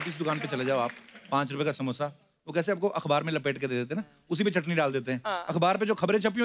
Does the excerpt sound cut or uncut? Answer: uncut